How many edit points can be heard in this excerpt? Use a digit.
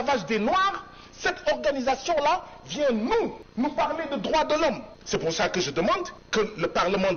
3